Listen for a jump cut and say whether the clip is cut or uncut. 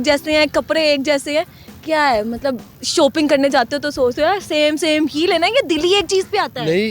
uncut